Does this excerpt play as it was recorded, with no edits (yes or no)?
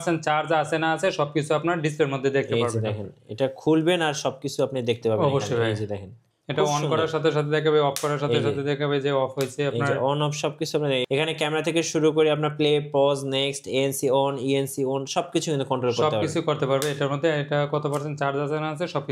yes